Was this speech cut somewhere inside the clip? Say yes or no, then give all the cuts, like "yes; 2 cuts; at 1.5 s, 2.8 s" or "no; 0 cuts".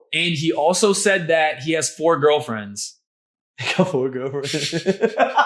no; 0 cuts